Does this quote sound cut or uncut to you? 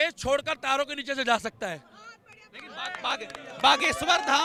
uncut